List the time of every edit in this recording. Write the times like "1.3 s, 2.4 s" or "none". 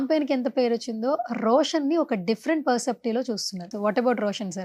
3.7 s